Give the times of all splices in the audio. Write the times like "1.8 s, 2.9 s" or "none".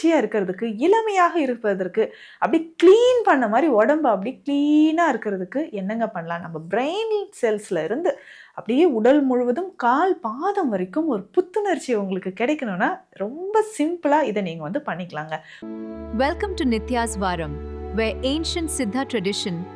15.5 s